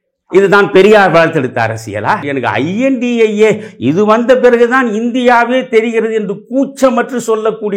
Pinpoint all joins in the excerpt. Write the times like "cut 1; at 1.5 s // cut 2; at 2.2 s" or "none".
cut 1; at 2.2 s